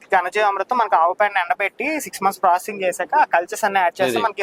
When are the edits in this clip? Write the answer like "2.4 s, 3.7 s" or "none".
none